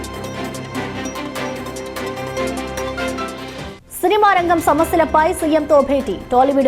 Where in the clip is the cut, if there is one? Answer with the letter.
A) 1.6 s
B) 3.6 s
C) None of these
B